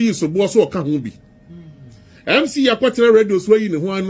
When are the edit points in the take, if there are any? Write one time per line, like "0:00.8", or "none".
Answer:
none